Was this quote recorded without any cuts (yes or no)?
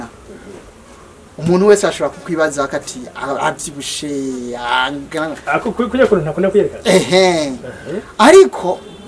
yes